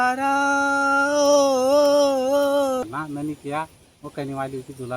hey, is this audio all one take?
no; 1 cut; at 2.8 s

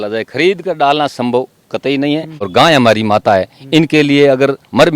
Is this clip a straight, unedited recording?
no; 1 cut; at 2.4 s

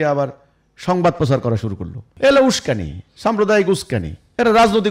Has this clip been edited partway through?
yes; 1 cut; at 2.0 s

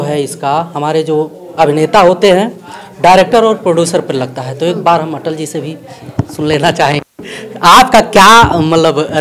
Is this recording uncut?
yes; 0 cuts

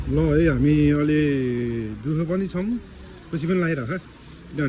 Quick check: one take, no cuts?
yes; 0 cuts

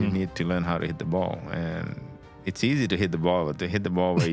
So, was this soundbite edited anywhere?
no; 0 cuts

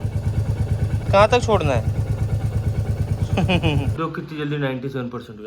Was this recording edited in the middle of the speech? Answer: yes; 1 cut; at 3.9 s

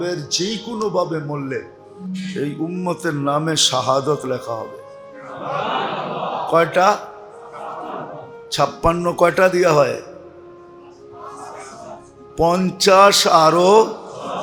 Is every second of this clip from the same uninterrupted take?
yes; 0 cuts

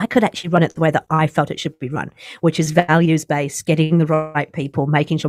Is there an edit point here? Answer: no; 0 cuts

